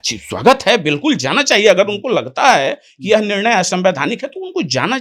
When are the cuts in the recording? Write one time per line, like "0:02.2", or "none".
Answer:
none